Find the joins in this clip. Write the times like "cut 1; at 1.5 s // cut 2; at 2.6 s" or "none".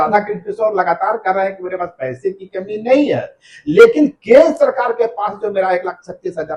none